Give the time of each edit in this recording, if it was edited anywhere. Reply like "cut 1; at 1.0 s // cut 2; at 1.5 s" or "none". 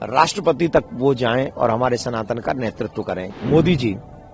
cut 1; at 3.3 s